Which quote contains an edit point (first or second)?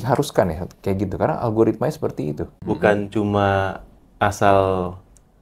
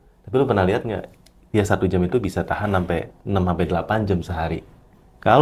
first